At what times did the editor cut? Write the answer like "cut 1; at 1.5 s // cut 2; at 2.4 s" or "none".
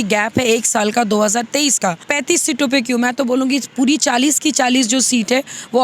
cut 1; at 2.1 s